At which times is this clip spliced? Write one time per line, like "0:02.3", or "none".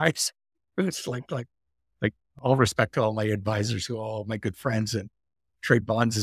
none